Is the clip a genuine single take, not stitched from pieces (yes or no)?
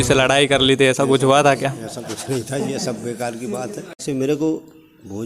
no